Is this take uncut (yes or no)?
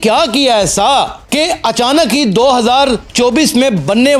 yes